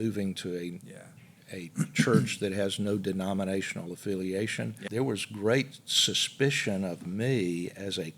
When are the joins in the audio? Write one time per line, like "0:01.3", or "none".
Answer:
0:04.8